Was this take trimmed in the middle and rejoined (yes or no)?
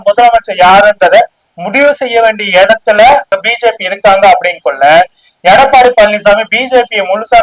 no